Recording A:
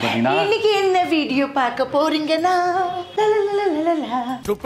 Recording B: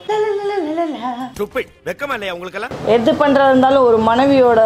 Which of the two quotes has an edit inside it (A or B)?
B